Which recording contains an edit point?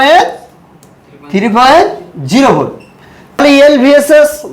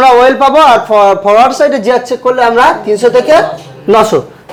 first; 1 cut; at 3.4 s

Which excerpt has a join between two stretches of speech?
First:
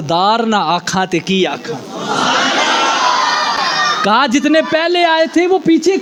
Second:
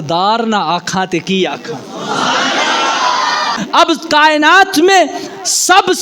second; 1 cut; at 3.6 s

